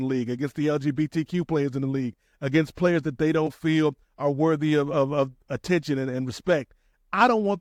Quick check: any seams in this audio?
no; 0 cuts

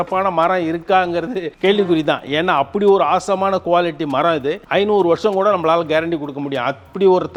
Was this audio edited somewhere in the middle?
no; 0 cuts

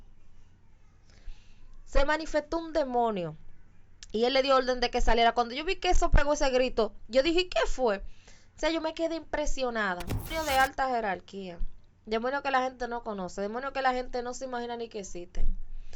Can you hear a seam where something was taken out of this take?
yes; 1 cut; at 10.3 s

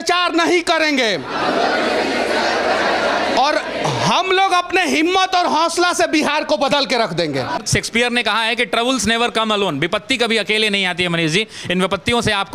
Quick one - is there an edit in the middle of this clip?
yes; 1 cut; at 7.6 s

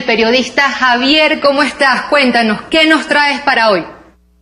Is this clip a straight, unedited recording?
yes; 0 cuts

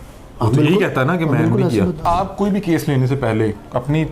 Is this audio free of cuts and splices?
no; 1 cut; at 2.0 s

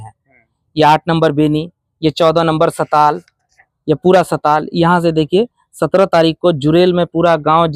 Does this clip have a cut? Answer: no; 0 cuts

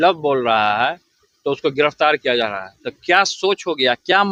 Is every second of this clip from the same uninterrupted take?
yes; 0 cuts

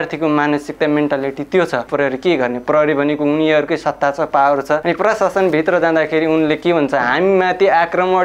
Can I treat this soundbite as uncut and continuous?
no; 2 cuts; at 1.9 s, 4.8 s

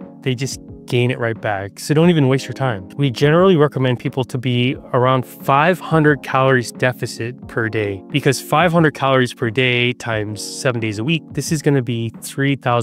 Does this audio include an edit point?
yes; 1 cut; at 2.9 s

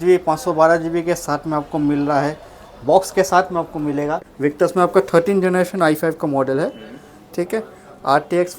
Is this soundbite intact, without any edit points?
no; 1 cut; at 4.3 s

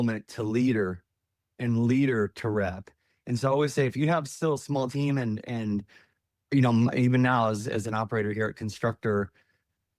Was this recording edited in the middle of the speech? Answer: no; 0 cuts

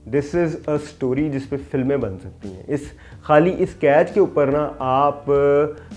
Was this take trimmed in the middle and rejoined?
no; 0 cuts

